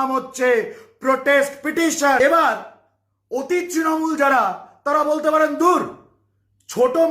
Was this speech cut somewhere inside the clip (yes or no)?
yes